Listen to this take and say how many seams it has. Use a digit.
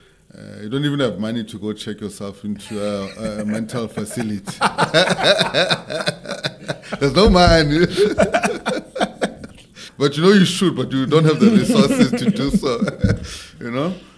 1